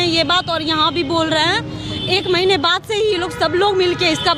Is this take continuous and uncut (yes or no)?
yes